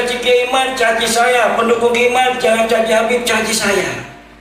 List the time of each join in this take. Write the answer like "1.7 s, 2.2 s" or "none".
none